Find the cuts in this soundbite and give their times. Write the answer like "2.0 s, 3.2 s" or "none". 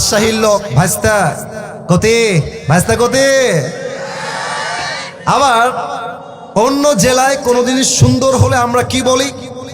2.6 s